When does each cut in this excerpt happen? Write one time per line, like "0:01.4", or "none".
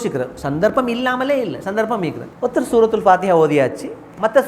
0:02.3